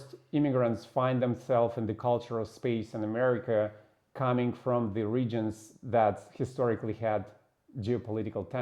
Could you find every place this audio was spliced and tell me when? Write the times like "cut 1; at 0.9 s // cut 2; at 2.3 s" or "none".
none

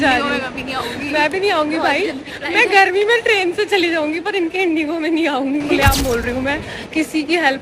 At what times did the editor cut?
cut 1; at 5.7 s

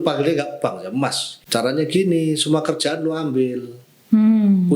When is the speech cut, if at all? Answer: cut 1; at 1.3 s

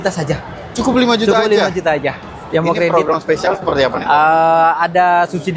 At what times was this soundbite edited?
cut 1; at 2.4 s

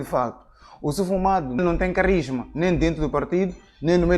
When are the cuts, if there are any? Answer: cut 1; at 1.6 s

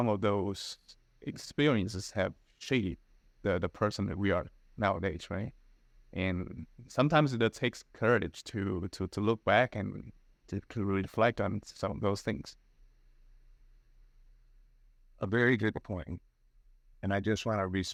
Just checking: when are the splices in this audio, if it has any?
none

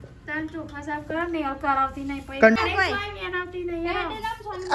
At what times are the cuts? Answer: cut 1; at 2.6 s

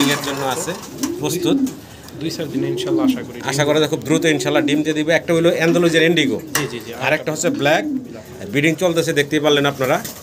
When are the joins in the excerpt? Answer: none

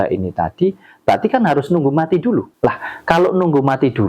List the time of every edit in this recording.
cut 1; at 2.5 s

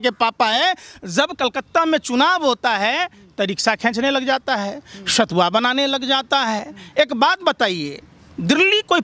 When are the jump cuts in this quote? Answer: none

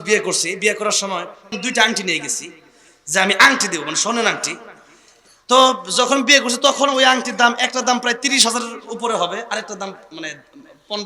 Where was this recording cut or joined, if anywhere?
cut 1; at 1.6 s

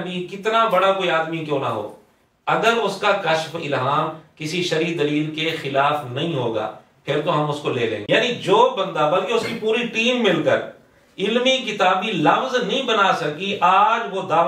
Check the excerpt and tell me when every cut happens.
cut 1; at 8.0 s

